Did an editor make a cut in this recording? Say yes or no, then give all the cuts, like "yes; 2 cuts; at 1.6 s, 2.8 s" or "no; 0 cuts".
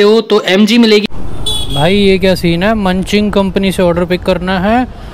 yes; 1 cut; at 1.0 s